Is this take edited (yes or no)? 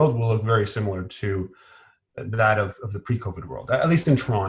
yes